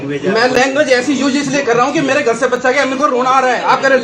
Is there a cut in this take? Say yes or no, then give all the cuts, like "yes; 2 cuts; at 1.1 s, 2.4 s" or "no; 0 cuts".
no; 0 cuts